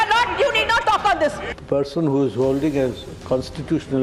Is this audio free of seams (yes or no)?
no